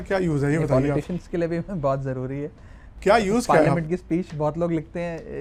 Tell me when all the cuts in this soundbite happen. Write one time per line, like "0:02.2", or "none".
none